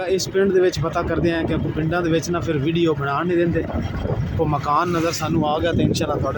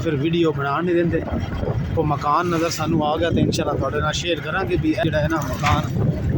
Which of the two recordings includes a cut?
second; 1 cut; at 5.0 s

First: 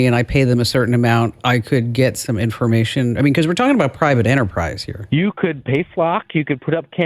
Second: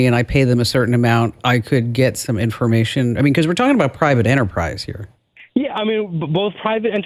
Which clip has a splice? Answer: first; 1 cut; at 4.9 s

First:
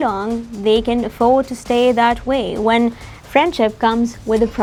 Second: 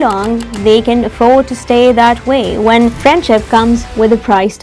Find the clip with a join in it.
second; 1 cut; at 3.0 s

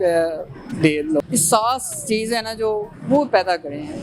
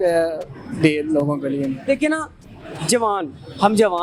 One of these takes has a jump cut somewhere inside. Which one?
first; 1 cut; at 1.2 s

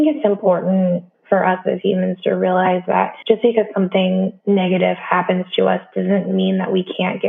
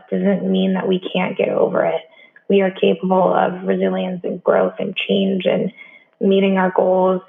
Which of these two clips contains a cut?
first; 3 cuts; at 1.1 s, 3.1 s, 4.4 s

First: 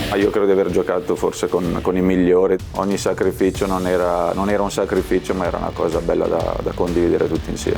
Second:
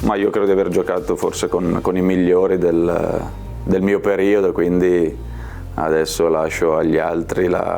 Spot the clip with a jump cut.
first; 1 cut; at 2.6 s

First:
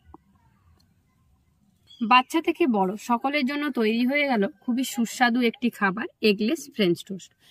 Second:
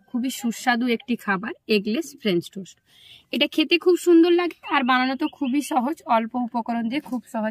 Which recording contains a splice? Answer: first; 1 cut; at 1.8 s

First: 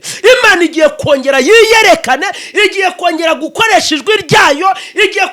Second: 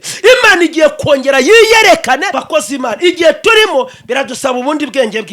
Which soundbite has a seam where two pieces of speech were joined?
second; 1 cut; at 2.4 s

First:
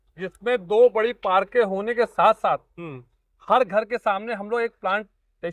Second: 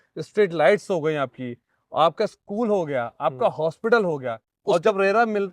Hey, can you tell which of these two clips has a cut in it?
second; 1 cut; at 4.5 s

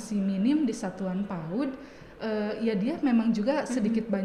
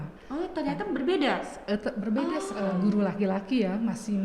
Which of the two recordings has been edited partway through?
second; 1 cut; at 2.5 s

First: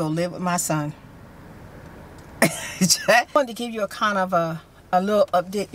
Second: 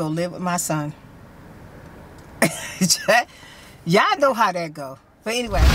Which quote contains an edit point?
first; 1 cut; at 3.3 s

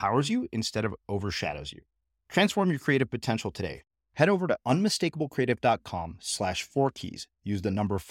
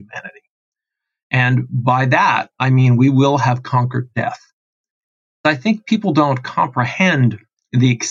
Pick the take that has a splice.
second; 1 cut; at 5.4 s

